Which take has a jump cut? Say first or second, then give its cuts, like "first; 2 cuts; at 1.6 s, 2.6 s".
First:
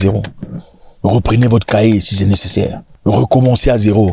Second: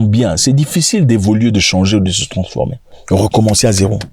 second; 1 cut; at 2.8 s